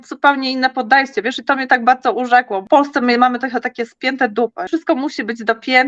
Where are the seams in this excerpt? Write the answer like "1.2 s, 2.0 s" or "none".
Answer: 2.6 s, 4.7 s